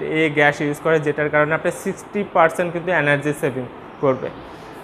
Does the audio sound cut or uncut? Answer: uncut